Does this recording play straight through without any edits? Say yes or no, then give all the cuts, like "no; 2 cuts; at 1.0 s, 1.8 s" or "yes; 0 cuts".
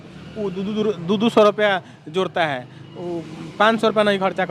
yes; 0 cuts